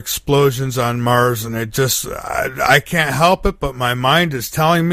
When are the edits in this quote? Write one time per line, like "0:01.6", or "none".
0:01.5